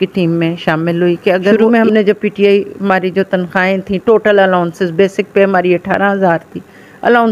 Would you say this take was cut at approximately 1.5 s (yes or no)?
yes